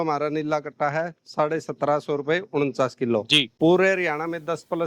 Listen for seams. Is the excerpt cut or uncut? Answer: cut